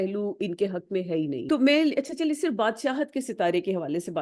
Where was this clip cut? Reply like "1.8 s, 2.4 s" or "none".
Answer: 1.4 s

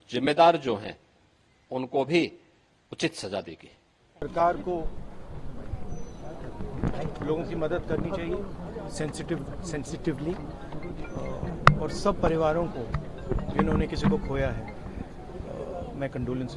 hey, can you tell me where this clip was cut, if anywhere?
none

